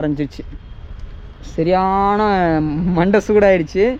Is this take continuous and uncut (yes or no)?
yes